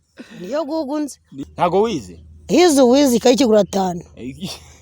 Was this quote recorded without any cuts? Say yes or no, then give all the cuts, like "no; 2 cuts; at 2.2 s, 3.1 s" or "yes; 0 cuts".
no; 1 cut; at 1.4 s